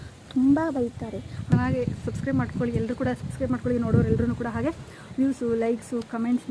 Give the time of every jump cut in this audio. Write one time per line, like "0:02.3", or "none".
0:01.4